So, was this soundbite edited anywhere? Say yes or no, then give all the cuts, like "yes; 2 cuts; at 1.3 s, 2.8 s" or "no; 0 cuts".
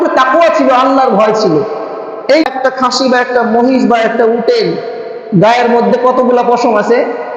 yes; 1 cut; at 2.5 s